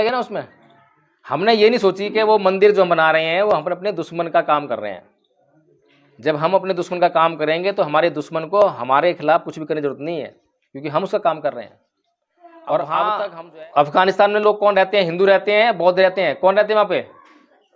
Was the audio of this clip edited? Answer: yes; 1 cut; at 13.4 s

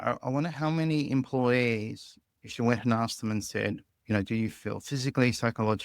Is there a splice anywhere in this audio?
yes; 1 cut; at 3.9 s

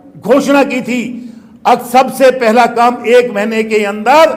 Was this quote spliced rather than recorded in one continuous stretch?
no; 0 cuts

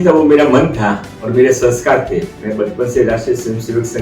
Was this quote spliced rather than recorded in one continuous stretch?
yes; 1 cut; at 2.4 s

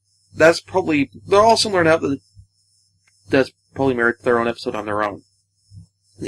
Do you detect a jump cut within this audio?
yes; 1 cut; at 3.0 s

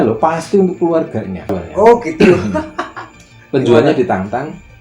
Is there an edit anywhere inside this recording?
yes; 1 cut; at 1.6 s

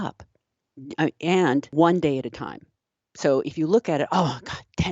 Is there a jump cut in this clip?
yes; 1 cut; at 1.7 s

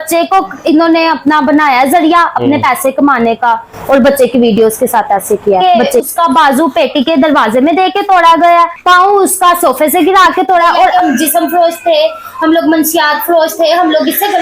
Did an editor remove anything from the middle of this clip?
yes; 2 cuts; at 5.8 s, 10.9 s

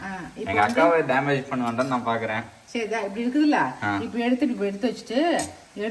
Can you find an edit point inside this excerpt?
no; 0 cuts

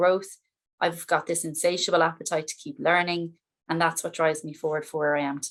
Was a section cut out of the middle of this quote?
no; 0 cuts

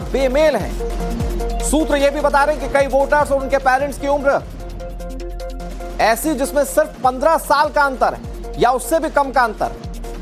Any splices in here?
yes; 1 cut; at 8.9 s

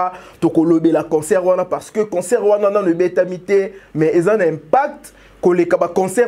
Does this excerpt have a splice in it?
no; 0 cuts

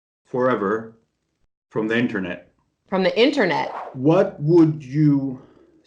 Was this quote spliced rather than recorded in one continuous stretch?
yes; 1 cut; at 3.8 s

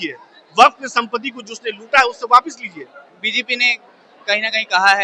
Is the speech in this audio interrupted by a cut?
no; 0 cuts

